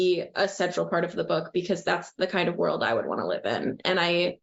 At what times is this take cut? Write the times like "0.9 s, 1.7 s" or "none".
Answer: none